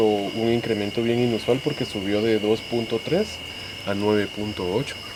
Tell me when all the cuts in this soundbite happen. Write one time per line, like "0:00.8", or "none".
none